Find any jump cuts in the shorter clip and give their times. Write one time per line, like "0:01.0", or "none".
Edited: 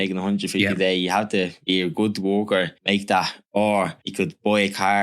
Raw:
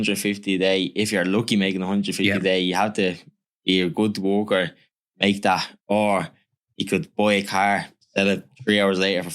0:01.6
0:02.8
0:04.0